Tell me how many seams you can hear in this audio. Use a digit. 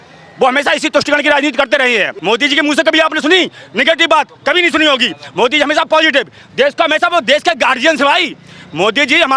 1